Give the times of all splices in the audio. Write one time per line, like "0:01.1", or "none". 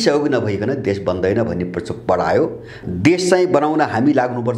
0:02.8